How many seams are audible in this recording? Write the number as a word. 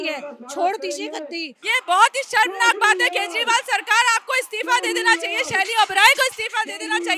one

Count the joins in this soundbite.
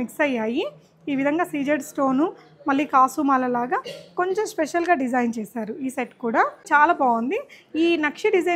one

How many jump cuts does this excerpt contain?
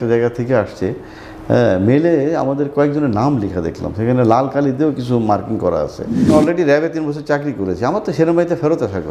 one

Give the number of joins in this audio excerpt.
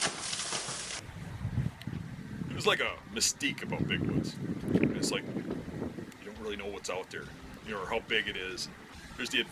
one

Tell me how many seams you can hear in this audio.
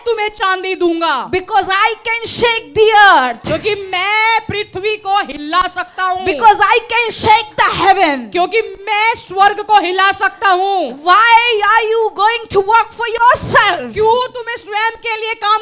zero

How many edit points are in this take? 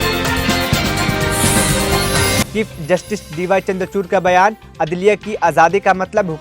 one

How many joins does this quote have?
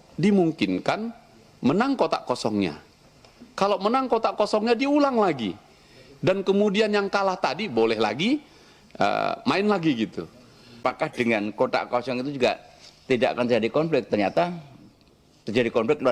one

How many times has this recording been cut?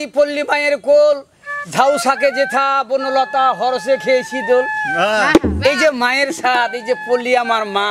zero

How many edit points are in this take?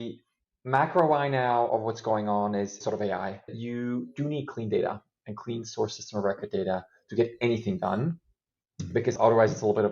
one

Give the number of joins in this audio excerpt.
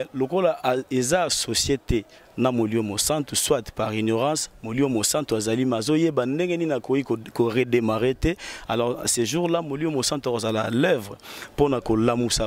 zero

